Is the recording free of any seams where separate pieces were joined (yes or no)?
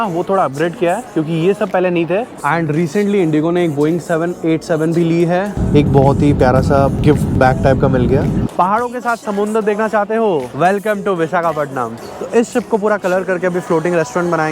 no